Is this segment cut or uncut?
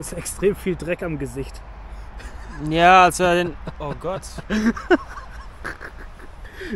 uncut